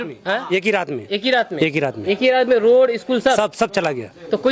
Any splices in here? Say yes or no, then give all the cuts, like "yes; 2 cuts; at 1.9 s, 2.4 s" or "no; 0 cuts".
no; 0 cuts